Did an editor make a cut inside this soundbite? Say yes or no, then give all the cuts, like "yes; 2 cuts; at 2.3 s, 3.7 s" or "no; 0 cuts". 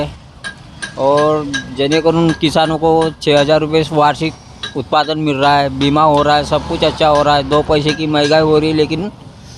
no; 0 cuts